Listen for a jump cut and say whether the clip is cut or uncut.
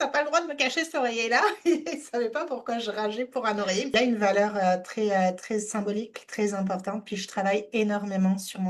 cut